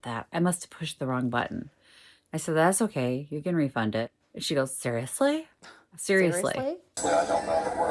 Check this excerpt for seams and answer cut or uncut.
cut